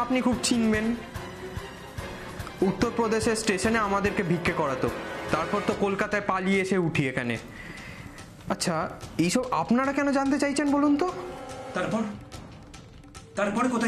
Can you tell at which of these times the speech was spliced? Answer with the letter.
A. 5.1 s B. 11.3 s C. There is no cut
A